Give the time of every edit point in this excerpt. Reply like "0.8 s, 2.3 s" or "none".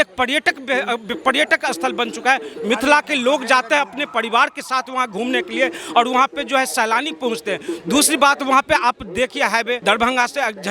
9.8 s